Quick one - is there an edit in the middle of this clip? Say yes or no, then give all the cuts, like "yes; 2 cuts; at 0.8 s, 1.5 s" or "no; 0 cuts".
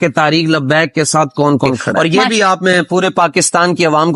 yes; 1 cut; at 1.9 s